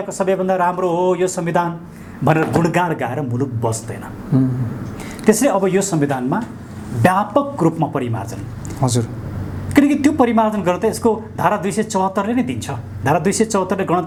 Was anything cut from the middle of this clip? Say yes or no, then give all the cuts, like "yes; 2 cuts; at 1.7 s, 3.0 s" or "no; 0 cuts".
no; 0 cuts